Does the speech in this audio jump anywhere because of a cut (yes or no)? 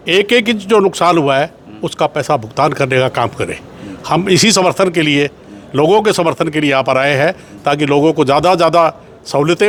no